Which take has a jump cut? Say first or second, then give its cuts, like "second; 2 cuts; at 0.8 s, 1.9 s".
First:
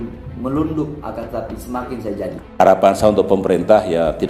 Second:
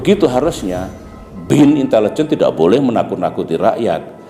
first; 1 cut; at 2.6 s